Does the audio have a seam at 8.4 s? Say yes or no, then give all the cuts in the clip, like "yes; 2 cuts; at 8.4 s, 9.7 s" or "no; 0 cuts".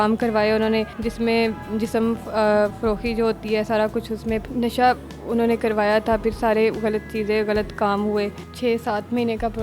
yes; 3 cuts; at 1.0 s, 4.4 s, 8.4 s